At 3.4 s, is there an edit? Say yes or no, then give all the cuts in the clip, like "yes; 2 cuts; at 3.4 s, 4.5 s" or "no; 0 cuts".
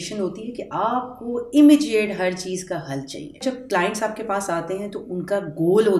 yes; 1 cut; at 3.4 s